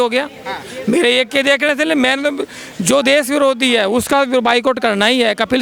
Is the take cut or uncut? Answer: uncut